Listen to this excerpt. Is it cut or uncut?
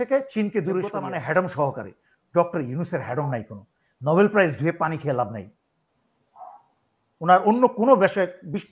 cut